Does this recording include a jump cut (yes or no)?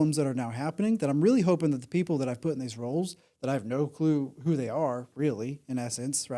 no